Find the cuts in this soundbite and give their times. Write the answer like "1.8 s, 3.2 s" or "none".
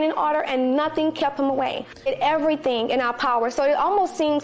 2.1 s